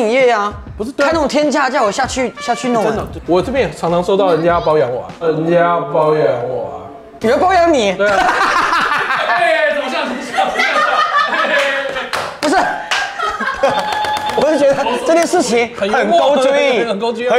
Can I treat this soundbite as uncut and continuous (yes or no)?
yes